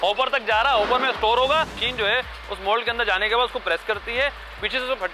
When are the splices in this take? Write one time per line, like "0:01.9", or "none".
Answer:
0:01.8

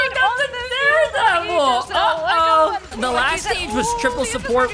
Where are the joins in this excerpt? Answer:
0:02.9

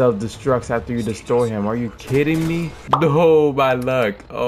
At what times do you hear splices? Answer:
0:02.8

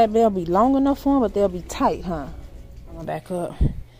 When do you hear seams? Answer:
0:03.0

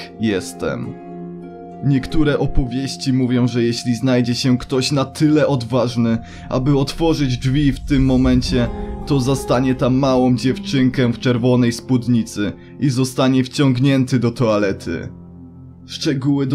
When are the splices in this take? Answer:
none

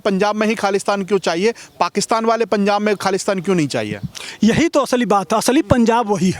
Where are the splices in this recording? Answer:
none

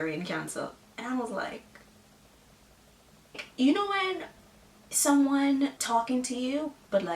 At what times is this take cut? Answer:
0:03.4
0:05.8

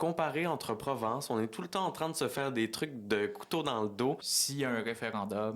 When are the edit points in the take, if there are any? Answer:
0:04.3

